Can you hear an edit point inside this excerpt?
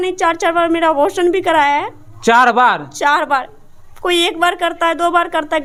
no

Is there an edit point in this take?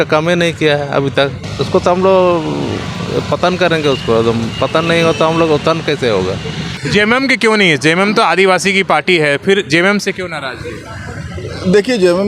yes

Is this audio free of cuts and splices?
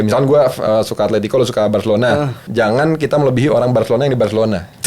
no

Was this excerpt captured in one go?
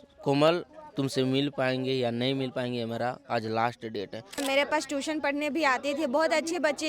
no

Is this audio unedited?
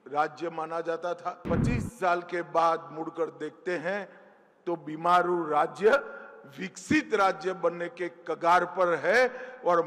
no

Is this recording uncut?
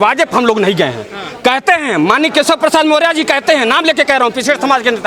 yes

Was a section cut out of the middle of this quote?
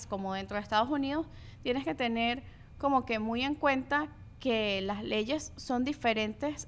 no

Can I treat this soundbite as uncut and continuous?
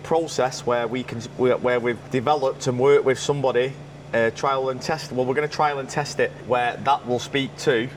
yes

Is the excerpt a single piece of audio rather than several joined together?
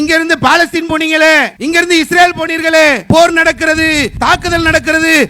no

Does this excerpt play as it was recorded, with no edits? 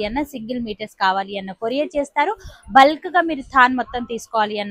yes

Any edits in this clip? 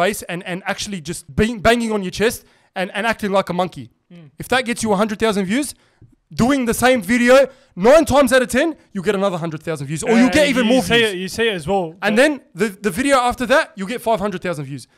yes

